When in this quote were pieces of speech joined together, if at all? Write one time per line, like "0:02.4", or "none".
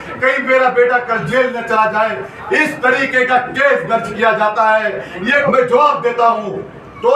0:05.4